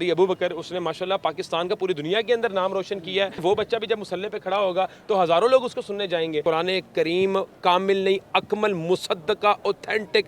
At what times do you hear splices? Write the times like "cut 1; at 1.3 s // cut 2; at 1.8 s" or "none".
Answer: cut 1; at 3.4 s // cut 2; at 6.4 s